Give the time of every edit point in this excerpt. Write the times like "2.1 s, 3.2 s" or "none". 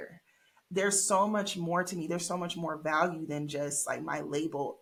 none